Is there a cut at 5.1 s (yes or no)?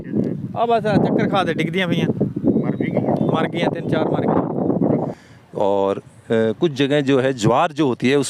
yes